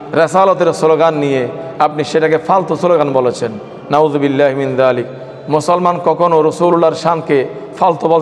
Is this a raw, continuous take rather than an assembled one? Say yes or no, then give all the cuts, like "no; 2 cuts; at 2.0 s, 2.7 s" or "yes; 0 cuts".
yes; 0 cuts